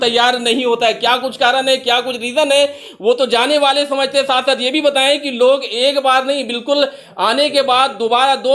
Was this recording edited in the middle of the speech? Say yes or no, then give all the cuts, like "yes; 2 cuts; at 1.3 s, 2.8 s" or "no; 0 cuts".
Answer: no; 0 cuts